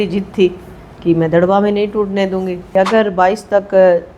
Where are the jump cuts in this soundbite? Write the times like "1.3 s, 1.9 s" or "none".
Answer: 2.7 s